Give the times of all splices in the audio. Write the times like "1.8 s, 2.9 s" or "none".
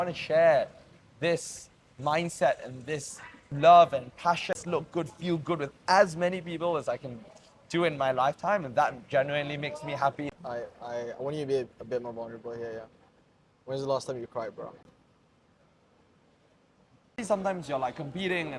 4.5 s, 10.2 s, 14.8 s, 17.2 s